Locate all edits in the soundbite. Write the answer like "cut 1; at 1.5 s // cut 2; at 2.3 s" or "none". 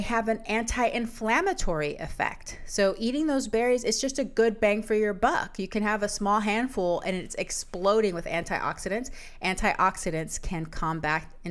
none